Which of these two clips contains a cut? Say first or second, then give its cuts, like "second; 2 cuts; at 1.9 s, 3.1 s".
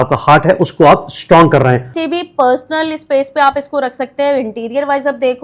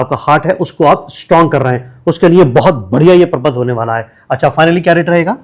first; 1 cut; at 1.9 s